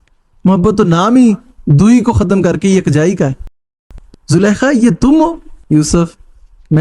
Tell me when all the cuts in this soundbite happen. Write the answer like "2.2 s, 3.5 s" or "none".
3.5 s, 5.5 s